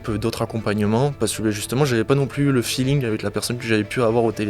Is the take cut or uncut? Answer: uncut